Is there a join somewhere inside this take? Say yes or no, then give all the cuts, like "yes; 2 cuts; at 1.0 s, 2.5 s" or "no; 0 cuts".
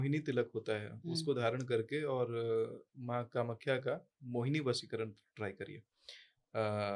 no; 0 cuts